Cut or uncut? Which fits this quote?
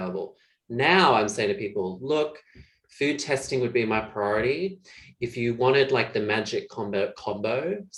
uncut